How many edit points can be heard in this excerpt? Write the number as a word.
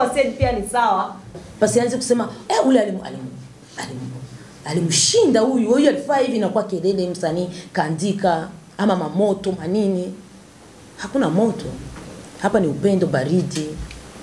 one